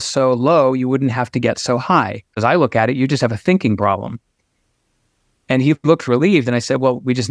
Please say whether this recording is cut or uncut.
cut